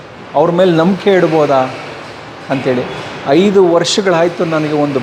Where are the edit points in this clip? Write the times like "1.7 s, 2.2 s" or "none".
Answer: none